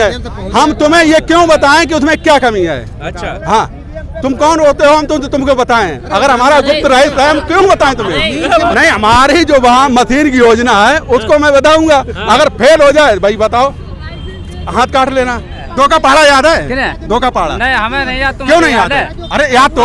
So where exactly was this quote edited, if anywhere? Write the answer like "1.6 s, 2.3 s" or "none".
8.7 s, 15.6 s